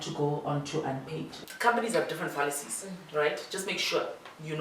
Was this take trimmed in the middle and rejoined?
yes; 1 cut; at 1.4 s

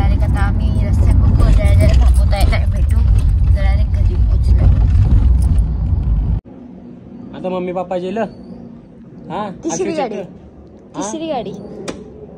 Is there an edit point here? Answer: yes; 1 cut; at 6.5 s

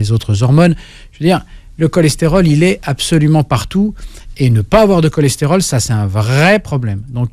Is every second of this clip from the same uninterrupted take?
yes; 0 cuts

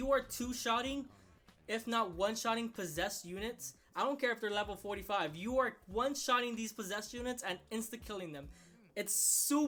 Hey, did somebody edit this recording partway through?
no; 0 cuts

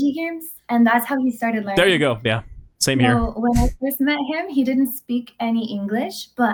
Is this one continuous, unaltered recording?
yes; 0 cuts

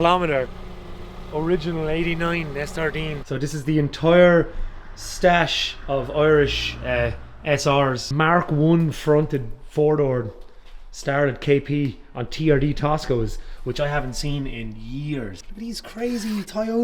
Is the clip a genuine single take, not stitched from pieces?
no; 3 cuts; at 3.2 s, 8.0 s, 15.4 s

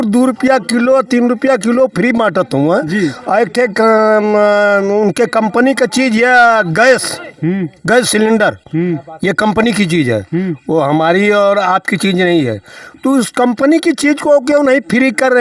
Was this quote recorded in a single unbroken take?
yes; 0 cuts

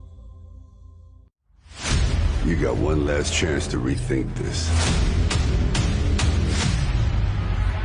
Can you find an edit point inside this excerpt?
yes; 1 cut; at 1.2 s

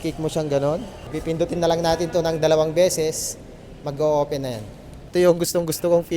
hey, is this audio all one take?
no; 2 cuts; at 1.0 s, 5.1 s

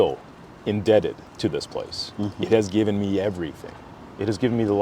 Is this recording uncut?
yes; 0 cuts

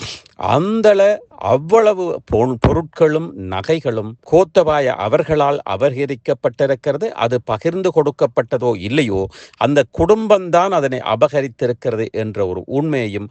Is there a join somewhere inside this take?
no; 0 cuts

